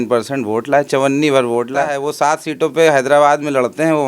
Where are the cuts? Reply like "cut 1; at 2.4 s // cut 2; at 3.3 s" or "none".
cut 1; at 2.0 s